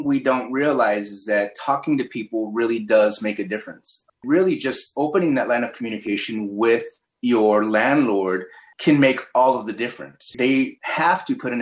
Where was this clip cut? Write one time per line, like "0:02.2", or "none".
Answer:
0:04.1